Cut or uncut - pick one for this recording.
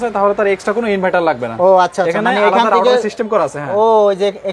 uncut